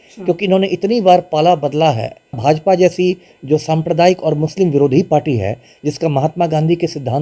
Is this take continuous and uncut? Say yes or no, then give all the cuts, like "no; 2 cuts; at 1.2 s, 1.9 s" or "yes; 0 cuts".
no; 1 cut; at 2.4 s